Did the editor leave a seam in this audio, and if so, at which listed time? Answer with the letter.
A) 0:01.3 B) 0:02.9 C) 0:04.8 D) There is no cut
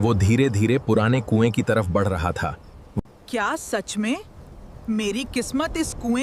D